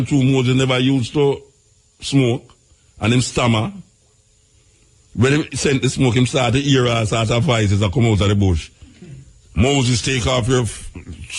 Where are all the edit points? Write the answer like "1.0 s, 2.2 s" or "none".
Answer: none